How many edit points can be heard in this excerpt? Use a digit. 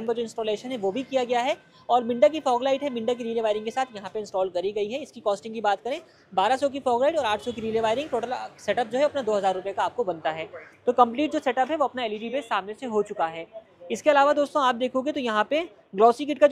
0